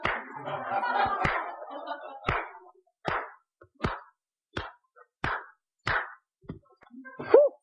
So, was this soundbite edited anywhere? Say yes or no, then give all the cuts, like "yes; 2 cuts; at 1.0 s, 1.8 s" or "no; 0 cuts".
no; 0 cuts